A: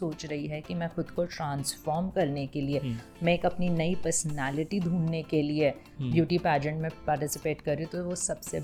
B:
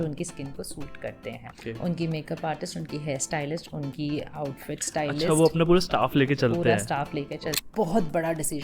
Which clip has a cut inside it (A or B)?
B